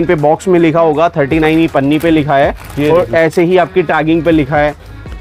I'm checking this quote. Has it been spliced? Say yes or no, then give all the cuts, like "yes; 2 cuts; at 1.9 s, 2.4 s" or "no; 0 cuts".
no; 0 cuts